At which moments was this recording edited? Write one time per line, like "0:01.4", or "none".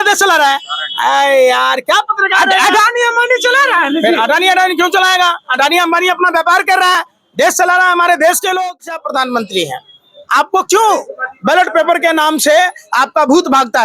0:09.0

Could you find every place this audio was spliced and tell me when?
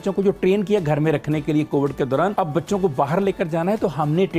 0:02.3

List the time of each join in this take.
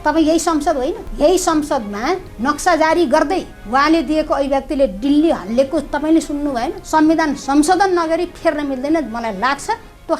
0:01.1
0:02.3
0:03.5
0:06.8

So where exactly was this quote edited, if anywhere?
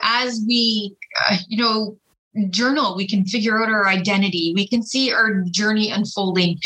none

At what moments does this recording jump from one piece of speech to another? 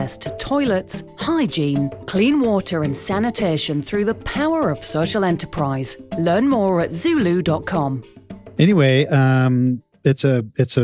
0:08.5

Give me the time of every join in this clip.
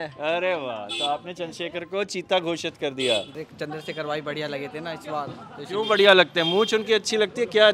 0:03.3

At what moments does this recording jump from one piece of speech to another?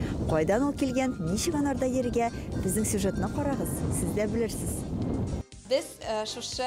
0:05.6

